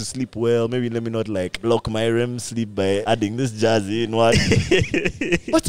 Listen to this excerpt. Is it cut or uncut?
cut